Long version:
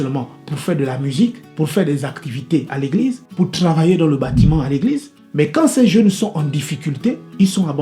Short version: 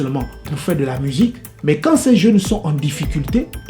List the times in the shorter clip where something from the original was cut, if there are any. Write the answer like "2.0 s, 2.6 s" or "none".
1.4 s